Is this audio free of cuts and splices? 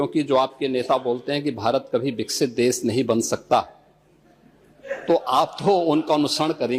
yes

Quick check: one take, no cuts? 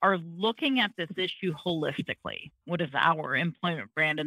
no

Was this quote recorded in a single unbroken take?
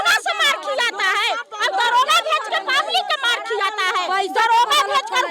yes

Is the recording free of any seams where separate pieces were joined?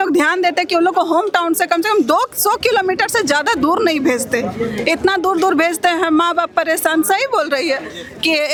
yes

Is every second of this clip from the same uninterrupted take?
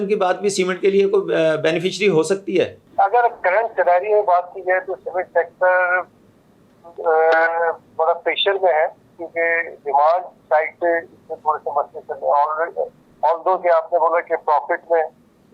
no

